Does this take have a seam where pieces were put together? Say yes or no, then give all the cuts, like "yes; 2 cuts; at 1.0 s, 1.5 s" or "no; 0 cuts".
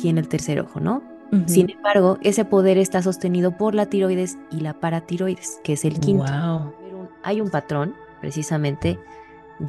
yes; 1 cut; at 7.1 s